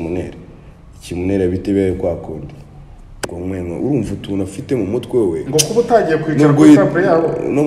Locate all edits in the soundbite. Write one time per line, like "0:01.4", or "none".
0:03.3